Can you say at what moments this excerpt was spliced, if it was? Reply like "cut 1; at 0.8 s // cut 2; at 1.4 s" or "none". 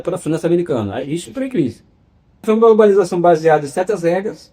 cut 1; at 2.4 s